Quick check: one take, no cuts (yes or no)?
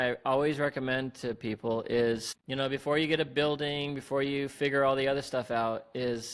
no